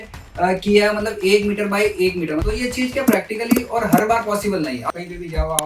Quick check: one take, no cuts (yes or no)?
no